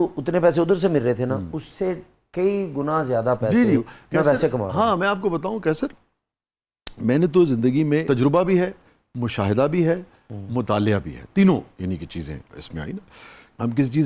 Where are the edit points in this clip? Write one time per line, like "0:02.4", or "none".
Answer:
none